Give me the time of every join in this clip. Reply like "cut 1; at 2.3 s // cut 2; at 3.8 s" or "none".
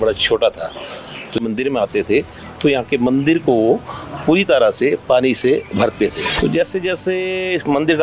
cut 1; at 1.4 s // cut 2; at 6.3 s